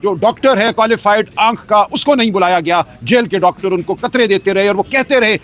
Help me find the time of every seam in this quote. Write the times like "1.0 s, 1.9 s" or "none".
none